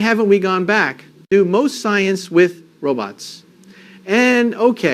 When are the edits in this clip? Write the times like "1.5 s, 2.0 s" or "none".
1.3 s